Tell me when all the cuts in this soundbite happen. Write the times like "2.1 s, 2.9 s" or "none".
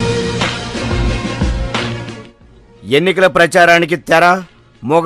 1.9 s